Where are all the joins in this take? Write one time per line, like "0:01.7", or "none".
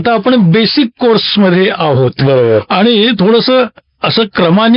none

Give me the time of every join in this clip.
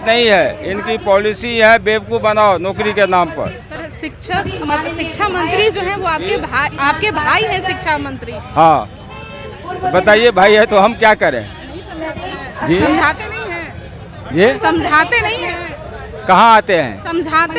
none

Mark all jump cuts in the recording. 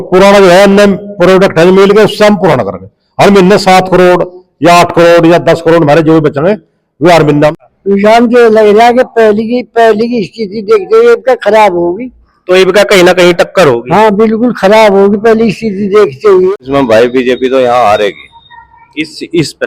0:07.6
0:16.5

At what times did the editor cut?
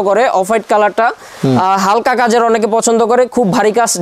none

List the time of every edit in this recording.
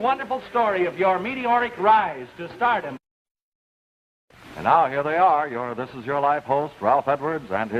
0:05.9

